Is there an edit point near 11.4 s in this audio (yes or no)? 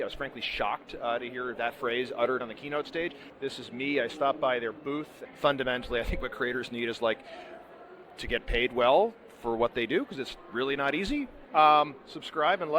yes